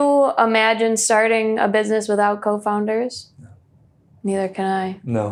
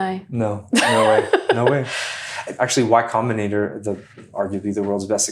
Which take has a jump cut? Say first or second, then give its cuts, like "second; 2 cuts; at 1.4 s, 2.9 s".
second; 2 cuts; at 2.5 s, 4.2 s